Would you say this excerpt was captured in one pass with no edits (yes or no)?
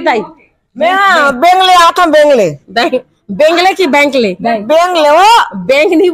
yes